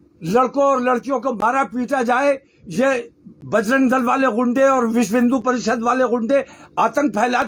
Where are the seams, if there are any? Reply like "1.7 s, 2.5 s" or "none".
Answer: none